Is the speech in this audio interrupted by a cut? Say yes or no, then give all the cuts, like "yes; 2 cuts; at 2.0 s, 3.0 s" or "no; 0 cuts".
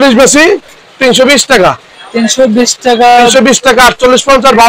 no; 0 cuts